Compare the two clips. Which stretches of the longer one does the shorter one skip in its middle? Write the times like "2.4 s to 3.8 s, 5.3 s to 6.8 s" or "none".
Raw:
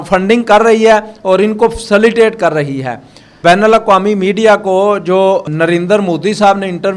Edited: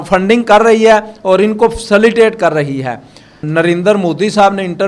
3.4 s to 5.4 s